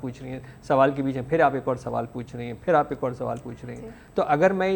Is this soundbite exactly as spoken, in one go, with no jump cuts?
yes; 0 cuts

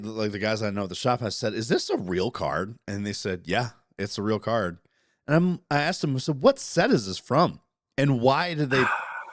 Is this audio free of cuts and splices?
yes; 0 cuts

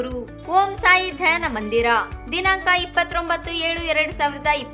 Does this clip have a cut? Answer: no; 0 cuts

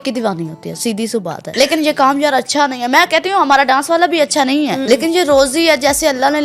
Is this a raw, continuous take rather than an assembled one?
no; 2 cuts; at 1.4 s, 4.8 s

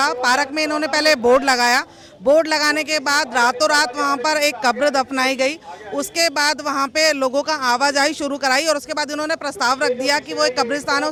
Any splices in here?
no; 0 cuts

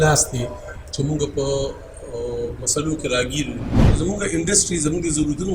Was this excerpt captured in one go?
no; 1 cut; at 3.9 s

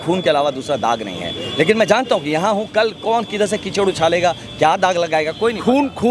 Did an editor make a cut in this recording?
no; 0 cuts

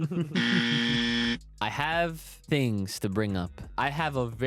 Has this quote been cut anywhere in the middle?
yes; 3 cuts; at 1.5 s, 2.3 s, 3.7 s

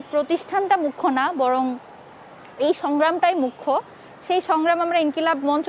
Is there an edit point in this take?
no; 0 cuts

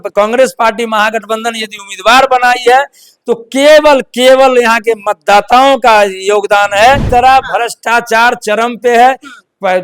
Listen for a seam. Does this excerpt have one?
yes; 1 cut; at 7.0 s

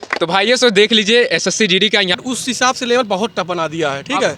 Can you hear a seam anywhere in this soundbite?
yes; 1 cut; at 2.2 s

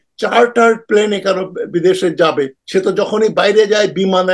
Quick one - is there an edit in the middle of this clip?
yes; 1 cut; at 2.6 s

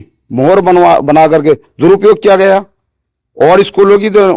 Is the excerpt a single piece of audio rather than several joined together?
yes; 0 cuts

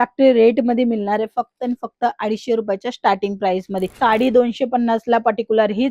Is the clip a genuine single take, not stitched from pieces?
no; 1 cut; at 3.9 s

